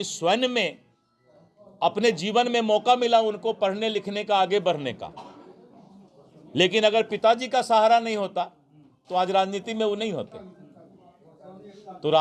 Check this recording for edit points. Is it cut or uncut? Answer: uncut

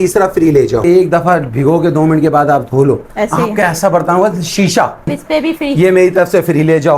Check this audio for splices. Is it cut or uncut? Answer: cut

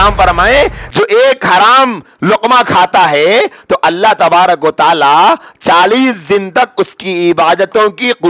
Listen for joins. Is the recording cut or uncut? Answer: uncut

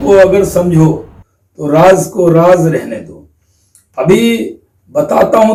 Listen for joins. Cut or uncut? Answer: uncut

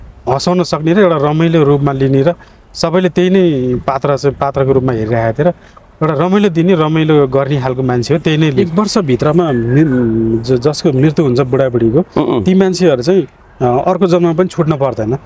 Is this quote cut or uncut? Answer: cut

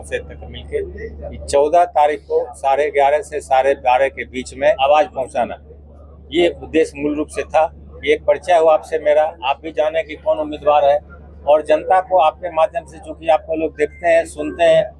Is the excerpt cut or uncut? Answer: cut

